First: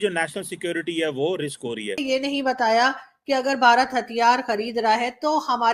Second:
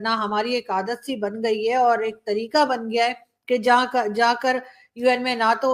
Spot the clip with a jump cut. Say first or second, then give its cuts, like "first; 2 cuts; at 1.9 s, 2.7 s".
first; 1 cut; at 2.0 s